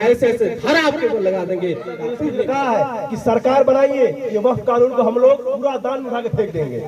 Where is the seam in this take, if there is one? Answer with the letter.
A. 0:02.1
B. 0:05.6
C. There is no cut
A